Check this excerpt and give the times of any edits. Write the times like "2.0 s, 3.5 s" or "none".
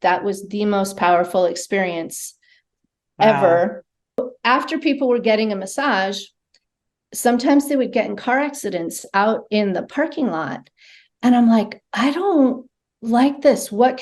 4.3 s